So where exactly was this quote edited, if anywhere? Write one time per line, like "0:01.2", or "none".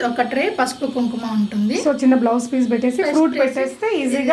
none